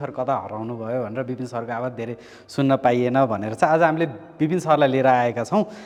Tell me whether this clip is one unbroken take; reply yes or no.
yes